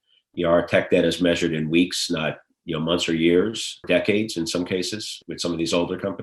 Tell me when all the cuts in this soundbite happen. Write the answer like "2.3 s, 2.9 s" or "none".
3.8 s, 5.2 s